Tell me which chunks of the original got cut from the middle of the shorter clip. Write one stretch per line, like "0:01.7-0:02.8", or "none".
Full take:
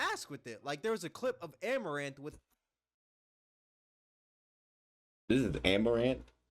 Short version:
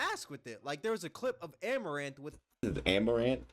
0:02.6-0:05.4